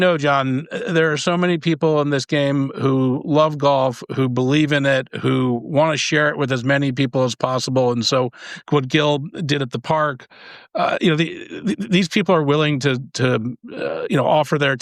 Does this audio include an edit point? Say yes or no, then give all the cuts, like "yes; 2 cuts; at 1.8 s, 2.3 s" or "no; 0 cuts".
no; 0 cuts